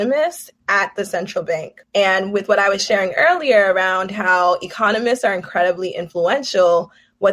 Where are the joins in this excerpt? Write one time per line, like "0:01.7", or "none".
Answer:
0:01.8